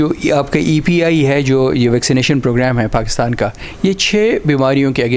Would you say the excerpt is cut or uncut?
uncut